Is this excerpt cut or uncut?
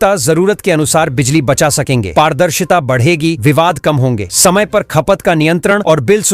uncut